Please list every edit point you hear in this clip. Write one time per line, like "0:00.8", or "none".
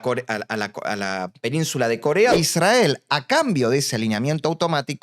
0:02.3